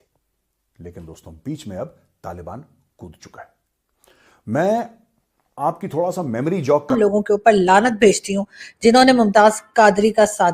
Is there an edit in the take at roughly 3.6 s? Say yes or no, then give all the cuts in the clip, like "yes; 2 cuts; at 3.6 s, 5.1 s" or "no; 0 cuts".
no; 1 cut; at 6.9 s